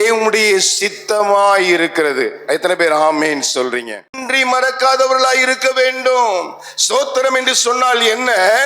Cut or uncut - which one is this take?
cut